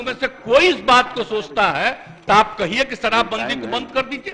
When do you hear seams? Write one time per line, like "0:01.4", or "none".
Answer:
none